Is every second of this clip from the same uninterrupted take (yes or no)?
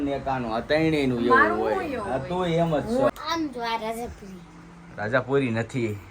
no